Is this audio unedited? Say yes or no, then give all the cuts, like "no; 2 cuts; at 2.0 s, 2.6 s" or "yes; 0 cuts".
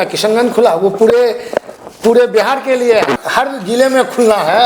no; 1 cut; at 3.2 s